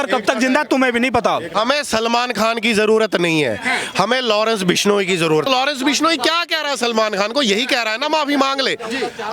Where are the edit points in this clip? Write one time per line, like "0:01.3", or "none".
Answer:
0:01.5
0:05.5